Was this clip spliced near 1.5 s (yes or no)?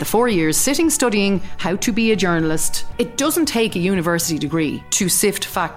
no